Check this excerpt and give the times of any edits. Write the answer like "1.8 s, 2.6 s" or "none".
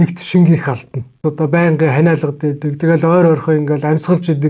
1.2 s